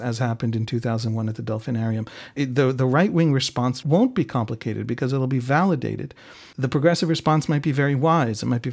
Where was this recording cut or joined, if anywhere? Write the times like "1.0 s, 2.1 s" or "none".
2.3 s, 3.8 s, 6.5 s